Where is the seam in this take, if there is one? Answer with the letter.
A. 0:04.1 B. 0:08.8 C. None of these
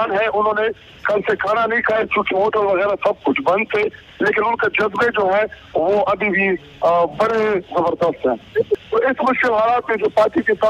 B